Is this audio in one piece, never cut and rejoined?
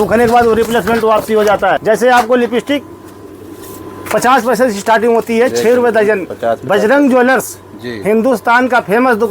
no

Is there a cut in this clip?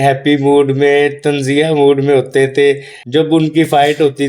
yes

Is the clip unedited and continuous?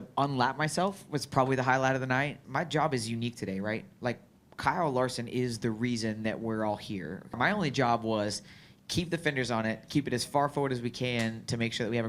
no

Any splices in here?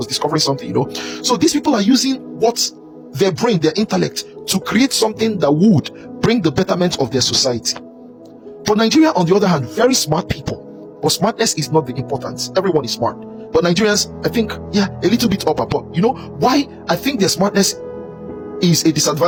no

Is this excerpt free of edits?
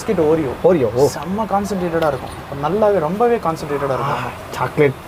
yes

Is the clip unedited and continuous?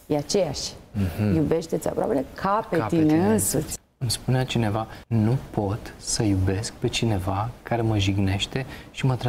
no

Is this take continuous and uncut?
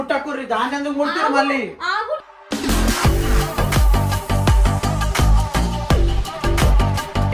yes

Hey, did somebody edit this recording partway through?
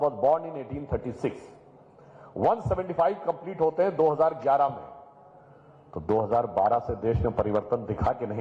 no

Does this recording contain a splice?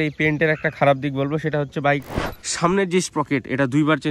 yes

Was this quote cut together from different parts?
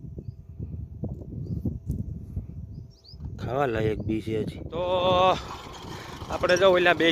yes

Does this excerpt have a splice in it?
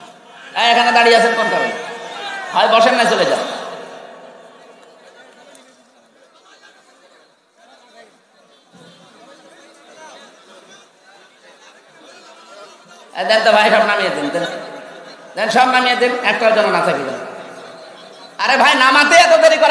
no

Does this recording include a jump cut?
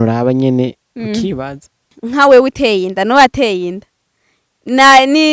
yes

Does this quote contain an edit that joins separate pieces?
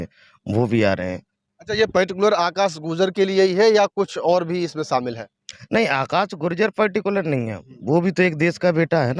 no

